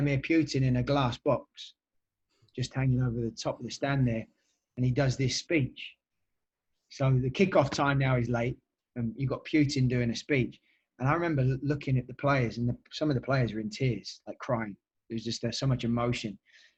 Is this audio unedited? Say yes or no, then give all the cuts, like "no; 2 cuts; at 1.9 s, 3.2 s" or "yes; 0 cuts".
yes; 0 cuts